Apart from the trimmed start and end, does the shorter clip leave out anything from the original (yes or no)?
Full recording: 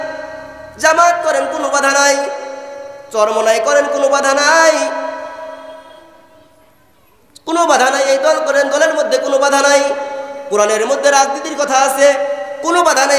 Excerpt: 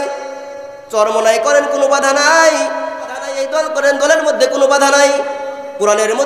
yes